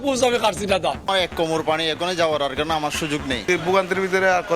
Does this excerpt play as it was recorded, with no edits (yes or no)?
no